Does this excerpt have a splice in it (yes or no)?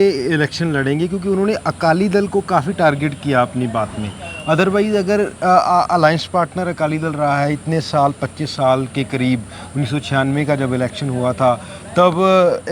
no